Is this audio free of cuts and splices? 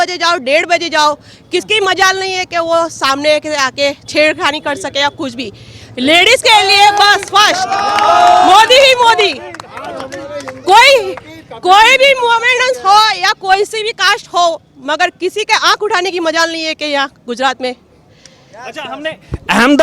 yes; 0 cuts

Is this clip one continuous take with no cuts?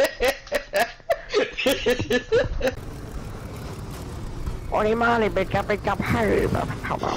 no; 1 cut; at 2.8 s

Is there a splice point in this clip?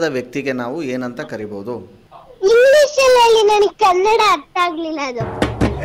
no; 0 cuts

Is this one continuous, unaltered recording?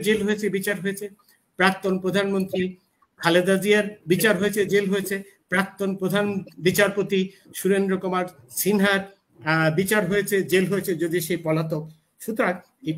yes; 0 cuts

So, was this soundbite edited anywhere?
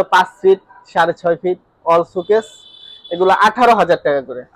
no; 0 cuts

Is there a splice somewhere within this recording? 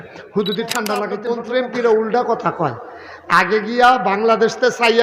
yes; 1 cut; at 1.3 s

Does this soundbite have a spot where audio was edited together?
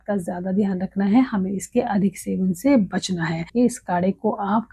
yes; 1 cut; at 3.4 s

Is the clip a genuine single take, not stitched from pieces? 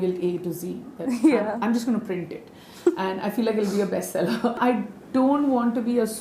no; 1 cut; at 4.6 s

